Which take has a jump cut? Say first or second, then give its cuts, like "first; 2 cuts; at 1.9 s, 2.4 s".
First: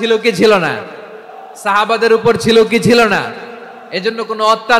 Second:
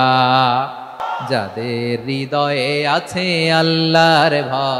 second; 1 cut; at 1.0 s